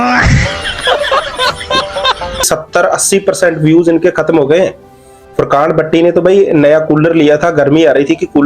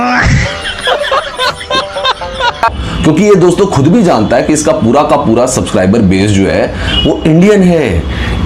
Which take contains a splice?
first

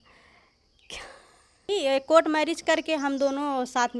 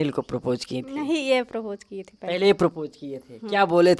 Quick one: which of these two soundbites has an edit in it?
first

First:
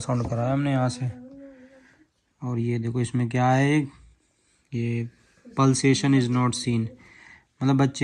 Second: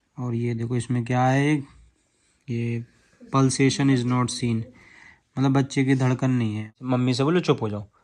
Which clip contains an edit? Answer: second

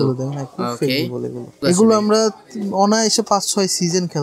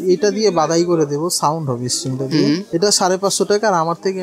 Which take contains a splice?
first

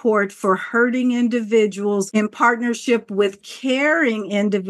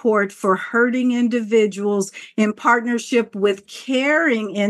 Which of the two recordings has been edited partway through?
first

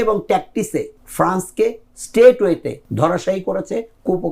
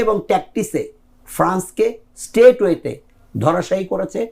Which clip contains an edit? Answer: first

